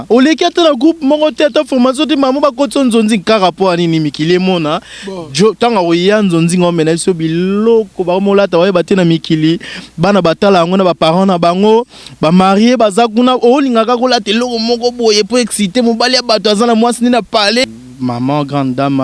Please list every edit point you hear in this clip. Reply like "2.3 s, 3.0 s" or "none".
17.6 s